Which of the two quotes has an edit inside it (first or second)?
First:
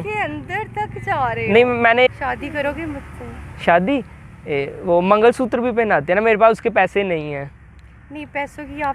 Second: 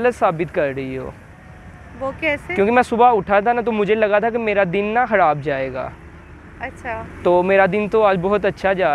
first